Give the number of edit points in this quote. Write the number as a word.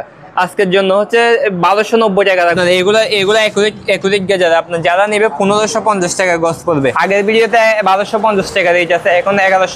two